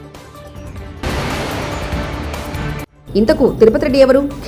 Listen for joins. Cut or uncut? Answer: cut